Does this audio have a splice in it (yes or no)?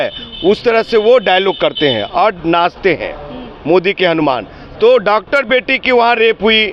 no